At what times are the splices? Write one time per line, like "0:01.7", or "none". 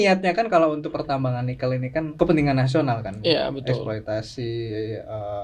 0:02.1